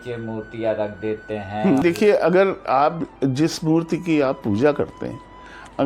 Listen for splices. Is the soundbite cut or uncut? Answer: cut